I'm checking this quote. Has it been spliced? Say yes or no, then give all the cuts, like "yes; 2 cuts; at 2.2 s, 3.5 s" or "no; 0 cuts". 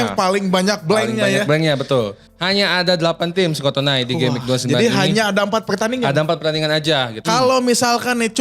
yes; 2 cuts; at 2.3 s, 7.2 s